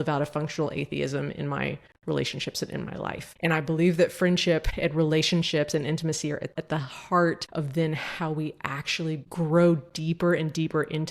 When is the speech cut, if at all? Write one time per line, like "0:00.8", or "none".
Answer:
0:04.7
0:06.5
0:07.4